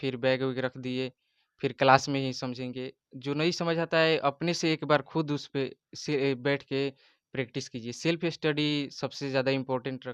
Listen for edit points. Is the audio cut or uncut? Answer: uncut